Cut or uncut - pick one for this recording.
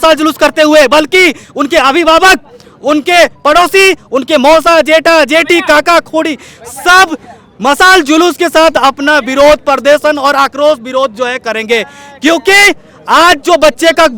uncut